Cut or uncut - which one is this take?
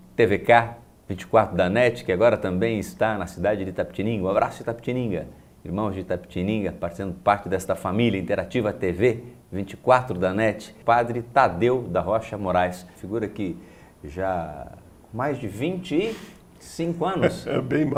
uncut